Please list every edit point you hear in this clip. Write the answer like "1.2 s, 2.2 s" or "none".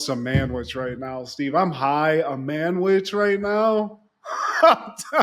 none